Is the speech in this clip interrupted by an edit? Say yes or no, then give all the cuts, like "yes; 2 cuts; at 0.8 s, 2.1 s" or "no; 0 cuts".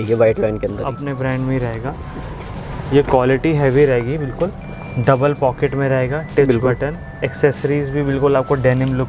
no; 0 cuts